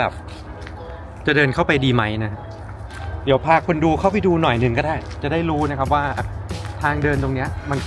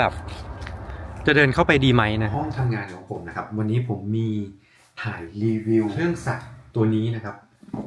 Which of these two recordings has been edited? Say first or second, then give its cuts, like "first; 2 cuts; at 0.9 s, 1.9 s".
second; 2 cuts; at 2.3 s, 5.9 s